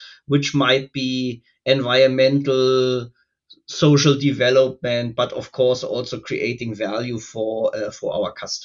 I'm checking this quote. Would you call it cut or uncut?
uncut